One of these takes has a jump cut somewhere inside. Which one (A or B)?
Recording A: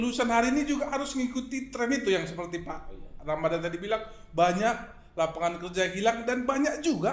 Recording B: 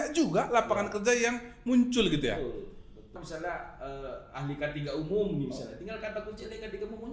B